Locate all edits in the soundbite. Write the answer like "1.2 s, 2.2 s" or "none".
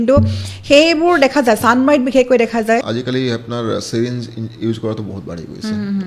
2.9 s